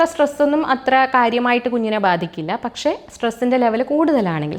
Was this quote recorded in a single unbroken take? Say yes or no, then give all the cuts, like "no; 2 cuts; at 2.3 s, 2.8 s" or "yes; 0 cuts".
yes; 0 cuts